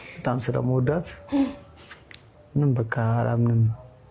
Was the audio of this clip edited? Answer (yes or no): no